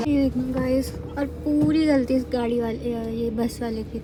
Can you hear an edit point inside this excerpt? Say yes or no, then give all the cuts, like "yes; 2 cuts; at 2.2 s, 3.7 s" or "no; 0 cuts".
no; 0 cuts